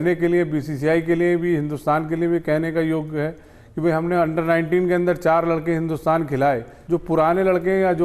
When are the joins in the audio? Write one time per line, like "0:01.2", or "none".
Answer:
0:06.7